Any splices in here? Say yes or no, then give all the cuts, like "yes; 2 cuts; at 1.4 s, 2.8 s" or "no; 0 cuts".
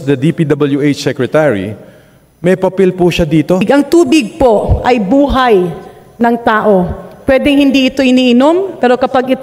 yes; 1 cut; at 3.6 s